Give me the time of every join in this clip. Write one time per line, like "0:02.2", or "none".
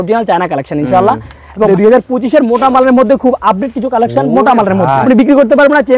0:01.7
0:05.0

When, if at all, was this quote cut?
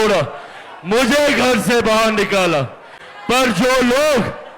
none

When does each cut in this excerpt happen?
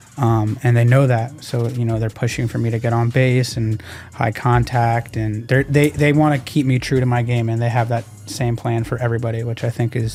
none

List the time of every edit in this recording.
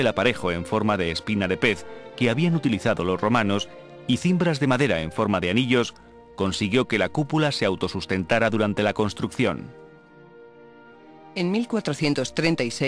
0:08.1

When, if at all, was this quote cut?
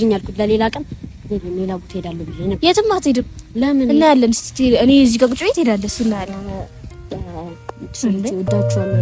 none

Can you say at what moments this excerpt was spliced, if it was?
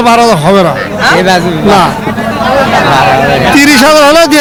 none

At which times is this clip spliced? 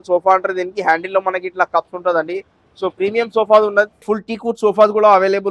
0:04.0

